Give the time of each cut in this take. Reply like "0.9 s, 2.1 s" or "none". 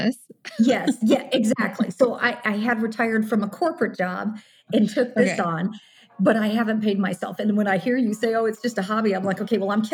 none